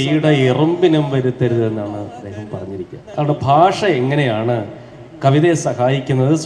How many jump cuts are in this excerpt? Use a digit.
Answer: 0